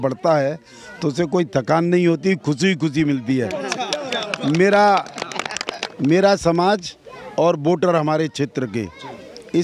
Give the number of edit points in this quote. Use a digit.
0